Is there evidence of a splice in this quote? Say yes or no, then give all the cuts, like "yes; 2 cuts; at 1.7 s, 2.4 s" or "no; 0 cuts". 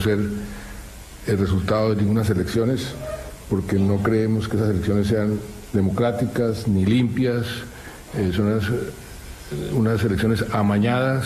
yes; 1 cut; at 6.4 s